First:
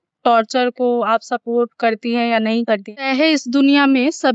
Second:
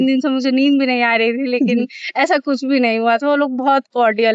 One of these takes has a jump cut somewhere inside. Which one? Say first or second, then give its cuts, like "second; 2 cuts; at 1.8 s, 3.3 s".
first; 1 cut; at 2.9 s